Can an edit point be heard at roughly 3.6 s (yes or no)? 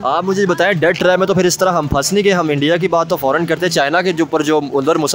no